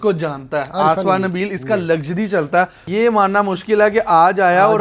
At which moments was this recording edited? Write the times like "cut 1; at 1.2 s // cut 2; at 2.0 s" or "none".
cut 1; at 2.8 s